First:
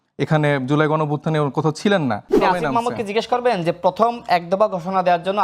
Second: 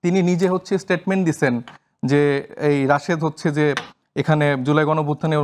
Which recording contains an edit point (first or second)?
first